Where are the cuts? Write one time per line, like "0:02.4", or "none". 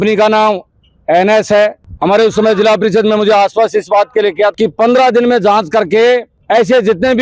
0:04.5

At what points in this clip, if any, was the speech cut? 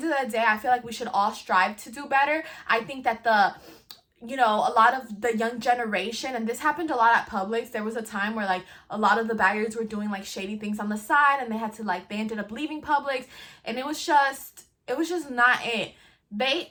none

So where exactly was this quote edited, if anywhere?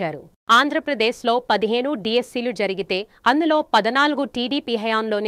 none

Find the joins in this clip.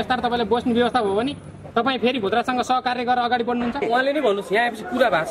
0:03.8

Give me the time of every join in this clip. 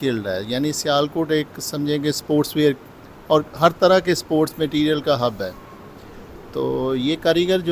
none

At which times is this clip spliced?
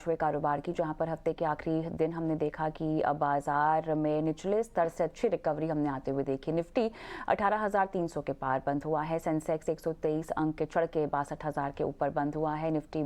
none

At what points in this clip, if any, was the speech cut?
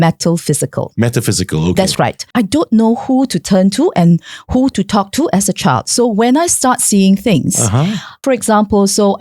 0:02.2
0:08.2

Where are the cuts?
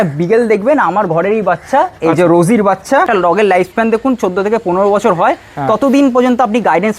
0:03.1

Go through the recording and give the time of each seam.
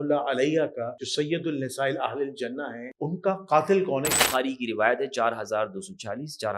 0:01.0
0:02.8
0:04.2

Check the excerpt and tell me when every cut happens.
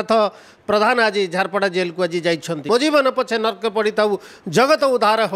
0:02.7

